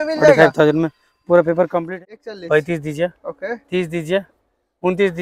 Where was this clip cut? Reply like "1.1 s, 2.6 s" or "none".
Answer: 1.9 s